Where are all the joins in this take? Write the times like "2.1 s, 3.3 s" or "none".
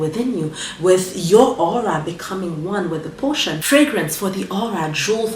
3.6 s